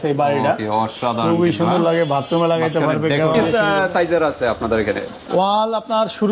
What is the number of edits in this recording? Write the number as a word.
one